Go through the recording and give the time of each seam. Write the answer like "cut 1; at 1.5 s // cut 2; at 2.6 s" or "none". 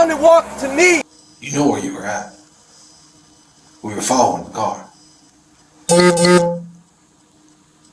cut 1; at 1.1 s